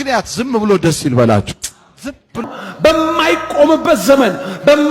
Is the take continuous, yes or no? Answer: no